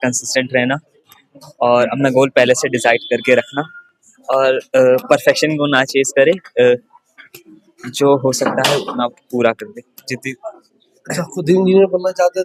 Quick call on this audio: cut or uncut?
uncut